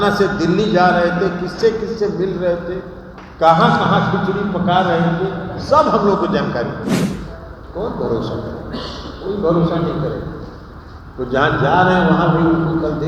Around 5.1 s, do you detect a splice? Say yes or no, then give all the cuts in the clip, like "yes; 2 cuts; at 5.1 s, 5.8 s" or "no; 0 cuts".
no; 1 cut; at 7.1 s